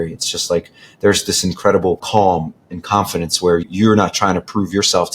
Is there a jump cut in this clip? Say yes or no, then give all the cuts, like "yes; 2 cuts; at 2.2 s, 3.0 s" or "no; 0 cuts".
yes; 2 cuts; at 2.0 s, 3.6 s